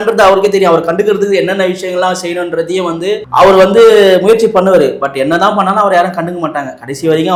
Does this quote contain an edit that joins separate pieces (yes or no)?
no